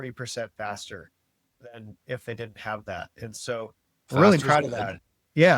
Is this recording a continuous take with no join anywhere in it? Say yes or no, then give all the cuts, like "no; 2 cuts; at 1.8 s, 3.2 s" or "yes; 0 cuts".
yes; 0 cuts